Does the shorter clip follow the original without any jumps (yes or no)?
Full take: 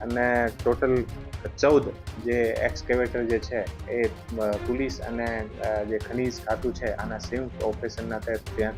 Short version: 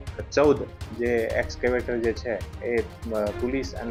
yes